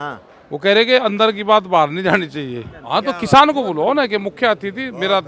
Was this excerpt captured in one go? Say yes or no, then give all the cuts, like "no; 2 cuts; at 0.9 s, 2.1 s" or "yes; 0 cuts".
no; 1 cut; at 2.8 s